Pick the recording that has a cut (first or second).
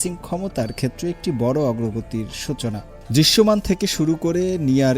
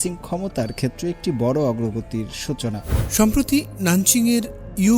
second